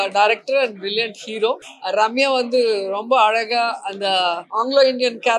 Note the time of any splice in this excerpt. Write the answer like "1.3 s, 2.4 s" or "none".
1.7 s, 4.4 s